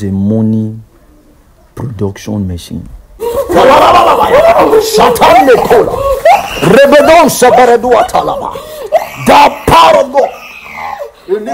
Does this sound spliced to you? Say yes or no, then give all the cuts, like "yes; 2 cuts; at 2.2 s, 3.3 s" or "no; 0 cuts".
yes; 1 cut; at 3.2 s